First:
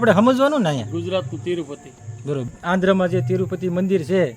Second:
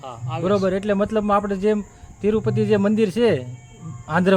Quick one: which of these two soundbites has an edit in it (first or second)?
first